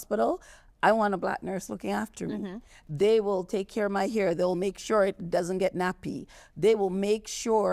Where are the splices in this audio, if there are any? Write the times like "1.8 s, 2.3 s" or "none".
none